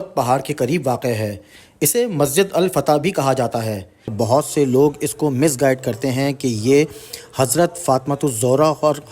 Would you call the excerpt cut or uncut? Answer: cut